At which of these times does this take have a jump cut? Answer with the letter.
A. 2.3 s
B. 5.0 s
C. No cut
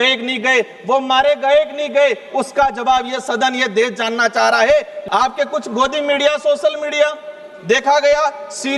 B